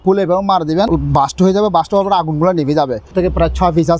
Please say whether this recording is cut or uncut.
cut